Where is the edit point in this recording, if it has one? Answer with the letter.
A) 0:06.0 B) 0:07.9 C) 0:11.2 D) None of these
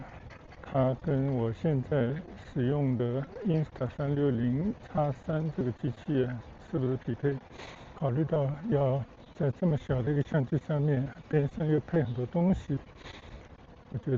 B